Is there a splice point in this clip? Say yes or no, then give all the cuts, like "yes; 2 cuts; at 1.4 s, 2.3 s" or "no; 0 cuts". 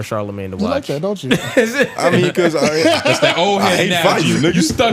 no; 0 cuts